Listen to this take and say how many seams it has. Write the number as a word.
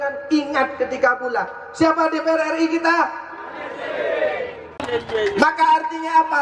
one